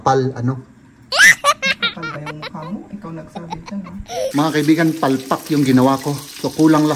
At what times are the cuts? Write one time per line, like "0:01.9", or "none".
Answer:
0:04.1